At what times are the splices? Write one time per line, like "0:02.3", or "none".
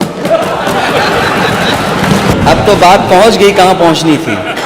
0:02.3